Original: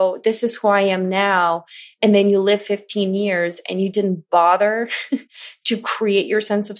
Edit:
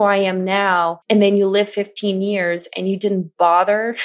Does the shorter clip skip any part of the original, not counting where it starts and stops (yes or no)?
yes